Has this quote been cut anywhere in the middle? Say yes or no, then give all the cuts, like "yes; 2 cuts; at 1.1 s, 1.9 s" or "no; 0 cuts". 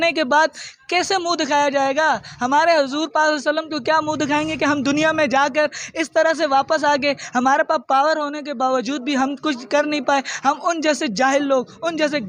no; 0 cuts